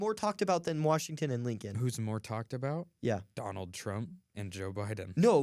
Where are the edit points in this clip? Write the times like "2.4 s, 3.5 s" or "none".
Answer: none